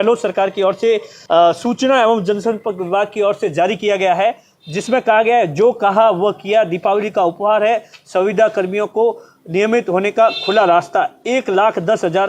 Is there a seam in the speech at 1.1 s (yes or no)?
yes